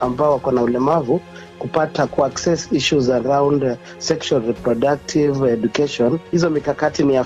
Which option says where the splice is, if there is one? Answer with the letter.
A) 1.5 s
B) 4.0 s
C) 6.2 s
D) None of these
C